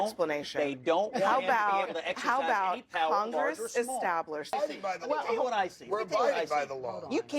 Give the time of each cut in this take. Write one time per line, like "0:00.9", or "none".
0:04.5